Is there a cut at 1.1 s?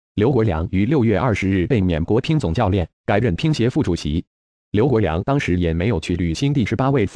no; 1 cut; at 5.0 s

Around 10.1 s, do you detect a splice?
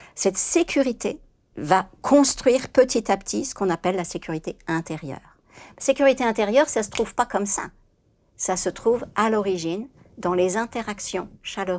no; 1 cut; at 1.5 s

